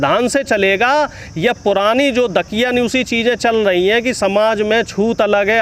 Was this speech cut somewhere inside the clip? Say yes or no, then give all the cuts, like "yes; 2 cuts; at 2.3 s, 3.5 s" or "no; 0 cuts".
no; 0 cuts